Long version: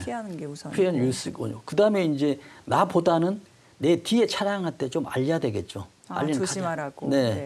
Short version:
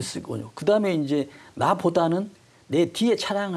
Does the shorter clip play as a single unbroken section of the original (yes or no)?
yes